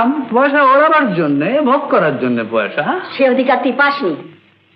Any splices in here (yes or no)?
no